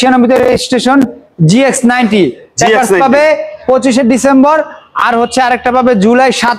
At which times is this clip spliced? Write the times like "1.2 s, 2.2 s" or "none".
none